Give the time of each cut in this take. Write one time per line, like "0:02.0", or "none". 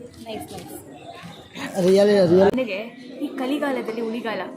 0:02.5